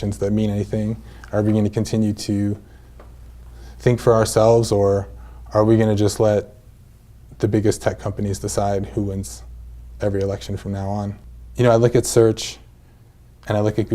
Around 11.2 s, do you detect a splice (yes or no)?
yes